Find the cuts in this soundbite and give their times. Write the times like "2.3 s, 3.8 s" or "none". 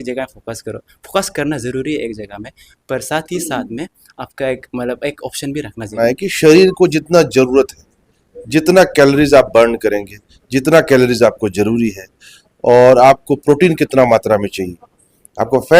6.0 s